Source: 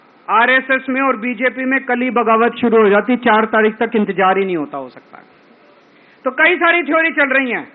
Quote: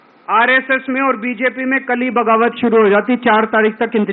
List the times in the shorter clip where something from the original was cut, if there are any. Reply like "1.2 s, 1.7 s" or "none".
none